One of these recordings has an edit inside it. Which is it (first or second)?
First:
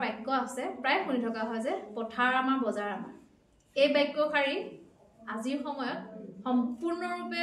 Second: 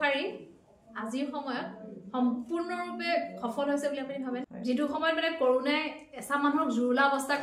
second